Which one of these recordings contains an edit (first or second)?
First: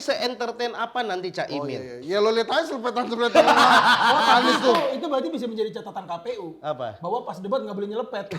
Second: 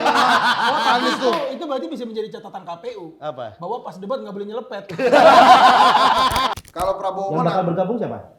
second